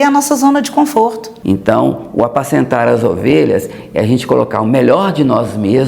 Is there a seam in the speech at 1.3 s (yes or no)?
yes